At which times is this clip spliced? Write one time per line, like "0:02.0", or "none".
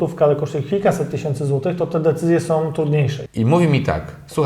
0:03.2